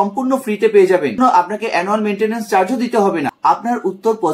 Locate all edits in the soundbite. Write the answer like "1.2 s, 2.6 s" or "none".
1.2 s, 3.3 s